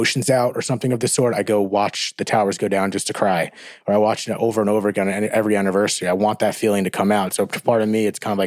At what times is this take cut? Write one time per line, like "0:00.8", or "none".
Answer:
none

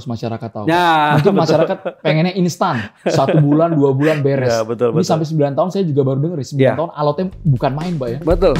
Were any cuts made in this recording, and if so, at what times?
none

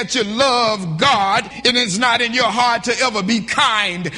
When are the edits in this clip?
0:01.5

